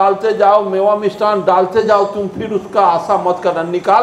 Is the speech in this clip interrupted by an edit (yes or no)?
no